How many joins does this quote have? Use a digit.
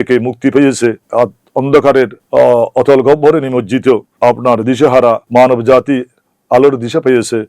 4